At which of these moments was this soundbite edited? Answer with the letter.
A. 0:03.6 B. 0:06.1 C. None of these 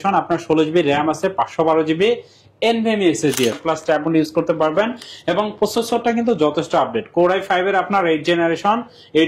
A